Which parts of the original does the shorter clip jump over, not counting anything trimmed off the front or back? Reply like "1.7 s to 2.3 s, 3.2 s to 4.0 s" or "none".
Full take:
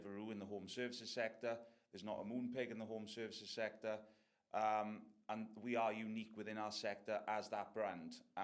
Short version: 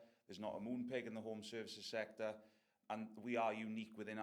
4.3 s to 5.1 s